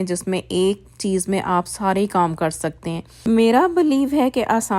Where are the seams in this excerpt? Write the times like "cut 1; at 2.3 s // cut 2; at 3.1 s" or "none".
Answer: cut 1; at 3.1 s

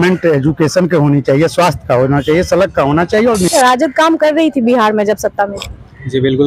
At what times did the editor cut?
cut 1; at 3.5 s

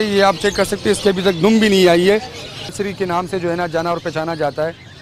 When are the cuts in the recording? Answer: cut 1; at 2.7 s

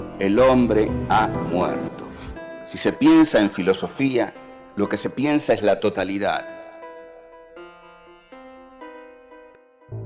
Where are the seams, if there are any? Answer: cut 1; at 6.9 s

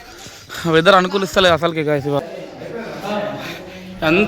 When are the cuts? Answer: cut 1; at 2.2 s

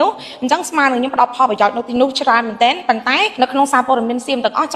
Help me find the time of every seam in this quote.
cut 1; at 3.3 s

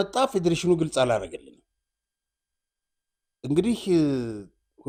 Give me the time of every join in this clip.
none

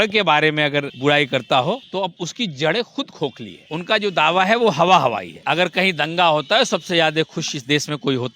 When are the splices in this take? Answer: cut 1; at 0.9 s // cut 2; at 2.1 s // cut 3; at 3.5 s // cut 4; at 5.3 s

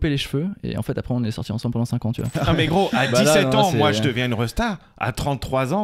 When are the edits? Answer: cut 1; at 2.3 s

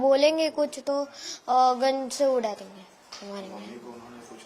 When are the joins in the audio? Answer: none

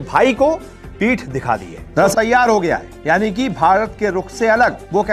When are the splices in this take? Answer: cut 1; at 1.9 s

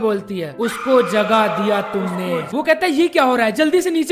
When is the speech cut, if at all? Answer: cut 1; at 2.5 s

